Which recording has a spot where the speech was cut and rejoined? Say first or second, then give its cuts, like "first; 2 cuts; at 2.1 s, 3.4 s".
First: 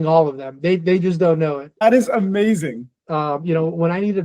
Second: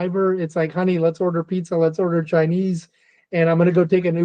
first; 2 cuts; at 1.8 s, 3.0 s